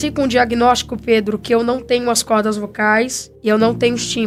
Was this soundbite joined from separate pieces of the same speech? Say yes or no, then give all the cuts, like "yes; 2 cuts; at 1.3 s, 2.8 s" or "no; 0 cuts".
no; 0 cuts